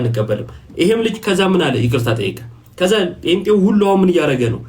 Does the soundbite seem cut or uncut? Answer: uncut